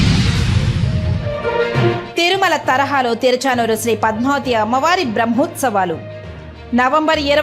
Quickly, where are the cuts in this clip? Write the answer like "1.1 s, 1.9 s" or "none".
2.0 s